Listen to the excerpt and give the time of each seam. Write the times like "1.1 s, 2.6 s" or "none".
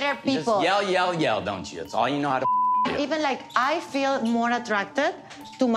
3.4 s